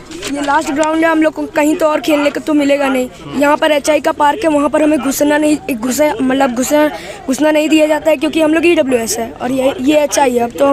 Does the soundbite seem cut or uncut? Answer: uncut